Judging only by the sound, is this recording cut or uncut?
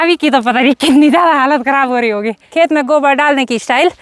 cut